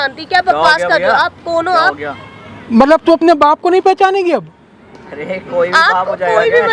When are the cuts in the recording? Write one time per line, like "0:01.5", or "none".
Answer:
none